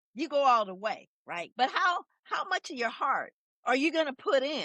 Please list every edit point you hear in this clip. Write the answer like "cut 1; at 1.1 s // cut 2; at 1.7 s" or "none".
cut 1; at 1.5 s // cut 2; at 3.4 s